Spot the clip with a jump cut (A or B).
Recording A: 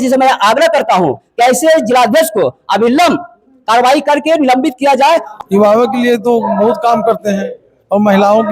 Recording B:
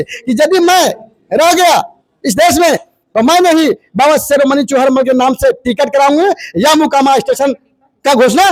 A